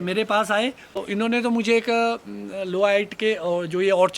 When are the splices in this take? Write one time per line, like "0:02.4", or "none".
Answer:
0:01.1